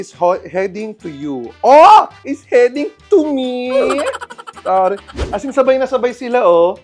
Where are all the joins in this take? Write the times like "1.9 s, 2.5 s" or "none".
5.2 s